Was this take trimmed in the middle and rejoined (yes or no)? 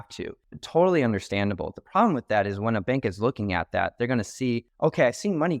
yes